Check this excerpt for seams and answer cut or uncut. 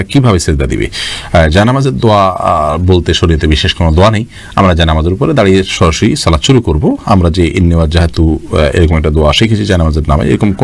uncut